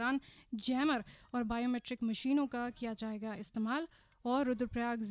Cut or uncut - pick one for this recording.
uncut